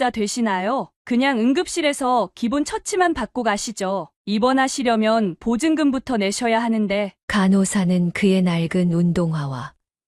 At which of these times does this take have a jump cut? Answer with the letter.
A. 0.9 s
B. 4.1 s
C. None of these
A